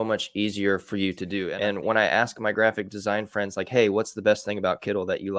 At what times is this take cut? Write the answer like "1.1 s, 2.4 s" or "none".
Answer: 1.5 s

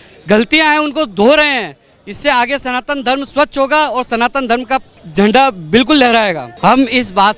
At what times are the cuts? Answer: 5.0 s, 6.5 s

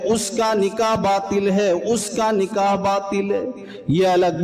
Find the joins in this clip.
none

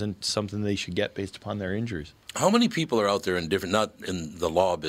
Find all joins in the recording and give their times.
none

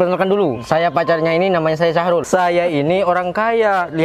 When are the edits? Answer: 2.2 s

